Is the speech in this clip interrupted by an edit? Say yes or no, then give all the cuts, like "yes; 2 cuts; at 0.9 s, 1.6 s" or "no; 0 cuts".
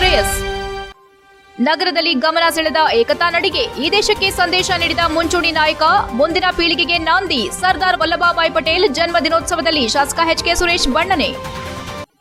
no; 0 cuts